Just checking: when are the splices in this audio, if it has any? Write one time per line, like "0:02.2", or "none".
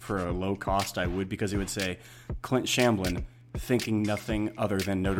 none